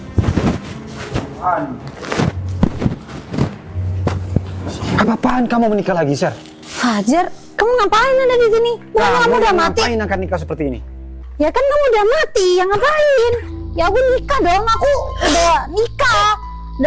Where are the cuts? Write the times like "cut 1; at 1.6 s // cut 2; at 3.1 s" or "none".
none